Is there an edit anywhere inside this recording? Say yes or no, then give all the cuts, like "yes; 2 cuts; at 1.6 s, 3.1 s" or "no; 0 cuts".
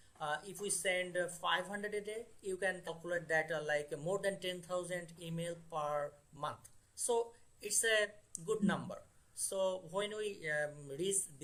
no; 0 cuts